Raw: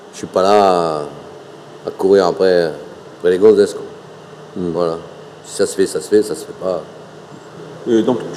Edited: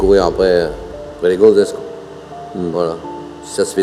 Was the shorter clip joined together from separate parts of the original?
no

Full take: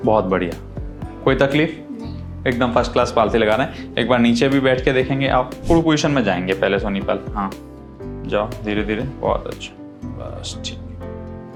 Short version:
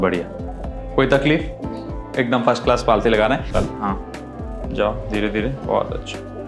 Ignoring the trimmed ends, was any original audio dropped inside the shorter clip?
yes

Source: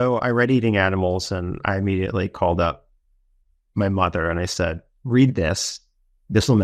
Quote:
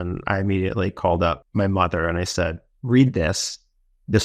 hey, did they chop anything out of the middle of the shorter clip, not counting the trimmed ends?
yes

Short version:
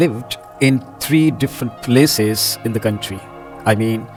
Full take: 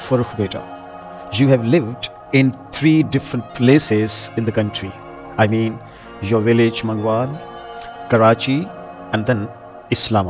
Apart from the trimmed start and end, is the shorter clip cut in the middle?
no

